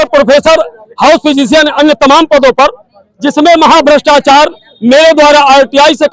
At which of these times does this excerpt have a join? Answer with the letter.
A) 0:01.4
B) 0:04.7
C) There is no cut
C